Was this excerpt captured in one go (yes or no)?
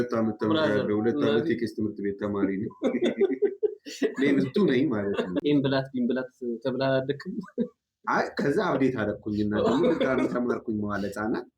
no